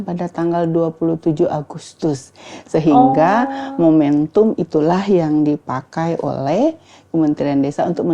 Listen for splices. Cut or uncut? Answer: uncut